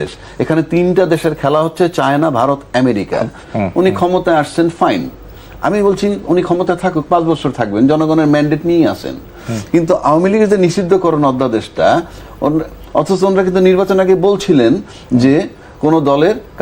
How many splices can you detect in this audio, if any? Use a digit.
1